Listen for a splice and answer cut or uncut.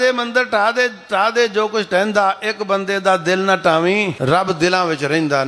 cut